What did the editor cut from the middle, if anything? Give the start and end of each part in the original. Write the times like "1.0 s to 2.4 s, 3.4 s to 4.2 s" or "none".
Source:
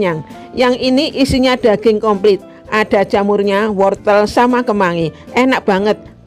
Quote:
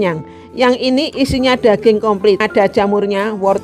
2.5 s to 2.8 s